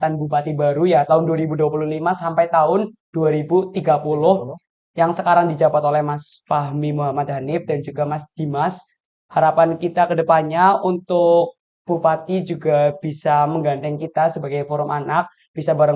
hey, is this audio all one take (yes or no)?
yes